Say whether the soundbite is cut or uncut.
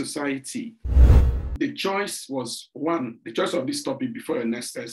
cut